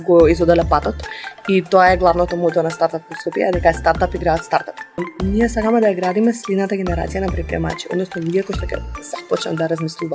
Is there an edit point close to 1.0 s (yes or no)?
no